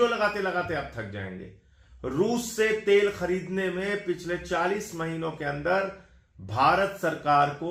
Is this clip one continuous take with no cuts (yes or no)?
yes